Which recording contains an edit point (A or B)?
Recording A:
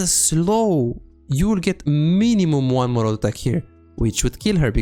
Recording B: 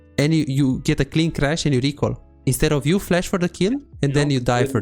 B